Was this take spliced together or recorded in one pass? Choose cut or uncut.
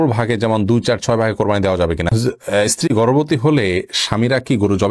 cut